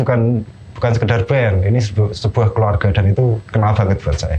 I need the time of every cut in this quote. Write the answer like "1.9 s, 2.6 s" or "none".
none